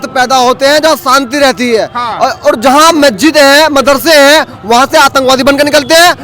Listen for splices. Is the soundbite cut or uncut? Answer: uncut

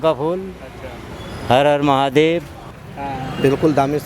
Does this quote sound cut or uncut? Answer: cut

